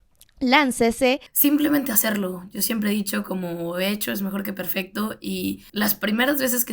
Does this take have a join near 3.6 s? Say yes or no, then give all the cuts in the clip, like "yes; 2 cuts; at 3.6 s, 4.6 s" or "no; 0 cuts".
no; 2 cuts; at 1.3 s, 5.6 s